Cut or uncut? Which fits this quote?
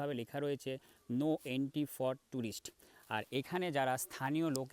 uncut